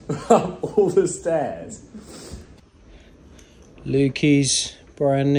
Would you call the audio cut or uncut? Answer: cut